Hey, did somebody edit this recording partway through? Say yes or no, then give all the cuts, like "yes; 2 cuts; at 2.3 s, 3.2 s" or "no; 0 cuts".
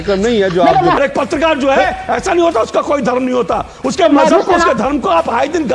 yes; 1 cut; at 1.0 s